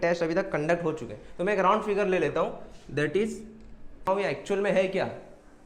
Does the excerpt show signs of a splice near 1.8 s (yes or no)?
no